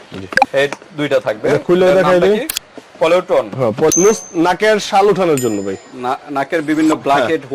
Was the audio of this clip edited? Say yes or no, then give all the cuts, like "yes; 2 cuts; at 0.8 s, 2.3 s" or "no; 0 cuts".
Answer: yes; 1 cut; at 3.9 s